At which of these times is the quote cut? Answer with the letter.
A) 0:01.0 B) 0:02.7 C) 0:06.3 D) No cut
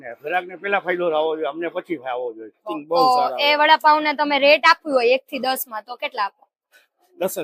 B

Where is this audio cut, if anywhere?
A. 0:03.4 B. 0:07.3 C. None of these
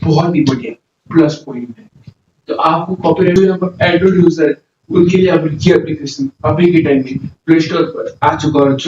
A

